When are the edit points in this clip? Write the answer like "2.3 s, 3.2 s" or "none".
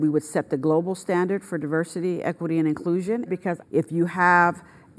3.3 s